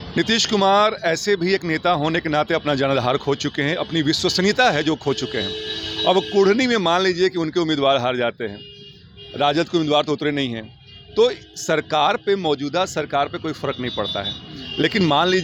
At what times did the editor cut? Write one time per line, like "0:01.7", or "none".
none